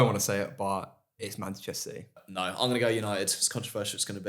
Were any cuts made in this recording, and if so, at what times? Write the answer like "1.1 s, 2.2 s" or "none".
2.2 s